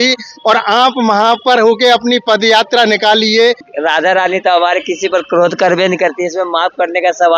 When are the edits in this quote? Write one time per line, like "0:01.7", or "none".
0:03.7